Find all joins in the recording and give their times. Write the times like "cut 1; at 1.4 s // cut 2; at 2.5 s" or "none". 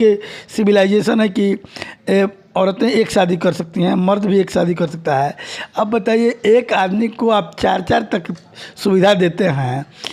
none